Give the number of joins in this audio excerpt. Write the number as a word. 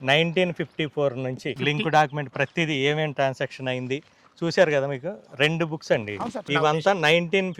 two